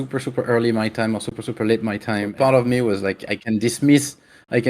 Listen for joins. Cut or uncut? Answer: cut